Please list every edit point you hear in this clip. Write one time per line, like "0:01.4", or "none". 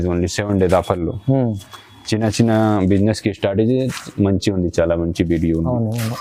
none